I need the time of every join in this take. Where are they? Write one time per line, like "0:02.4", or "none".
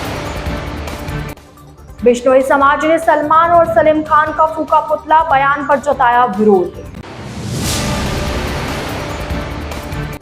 none